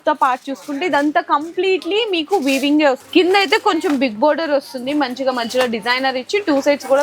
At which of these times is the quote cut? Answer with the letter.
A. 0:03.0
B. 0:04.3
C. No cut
A